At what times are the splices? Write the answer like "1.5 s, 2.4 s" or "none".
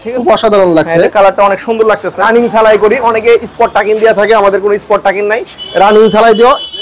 2.2 s